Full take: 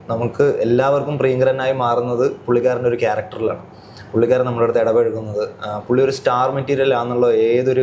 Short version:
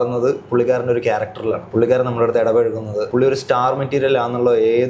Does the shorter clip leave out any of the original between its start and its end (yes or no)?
yes